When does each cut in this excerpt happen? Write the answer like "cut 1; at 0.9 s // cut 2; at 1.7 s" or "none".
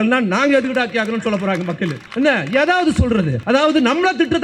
cut 1; at 2.0 s // cut 2; at 3.4 s